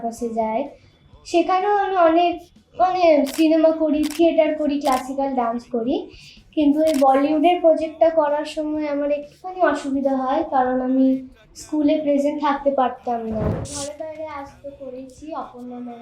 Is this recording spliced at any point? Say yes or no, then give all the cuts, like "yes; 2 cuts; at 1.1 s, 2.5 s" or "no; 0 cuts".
yes; 1 cut; at 13.5 s